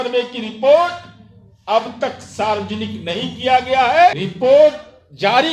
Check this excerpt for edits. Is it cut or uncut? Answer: cut